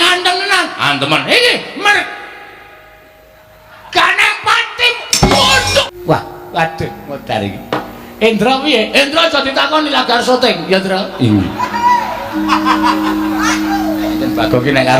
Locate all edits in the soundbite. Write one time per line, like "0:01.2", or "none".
0:05.6